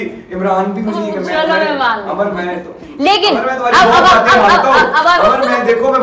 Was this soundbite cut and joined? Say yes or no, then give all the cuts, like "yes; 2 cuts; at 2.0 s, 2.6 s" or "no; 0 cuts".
no; 0 cuts